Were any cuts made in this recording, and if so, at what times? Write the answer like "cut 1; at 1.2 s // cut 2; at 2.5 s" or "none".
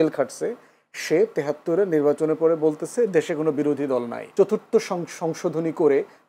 cut 1; at 4.2 s